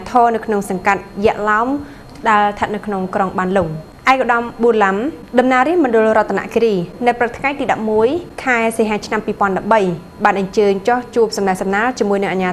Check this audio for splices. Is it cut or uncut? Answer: cut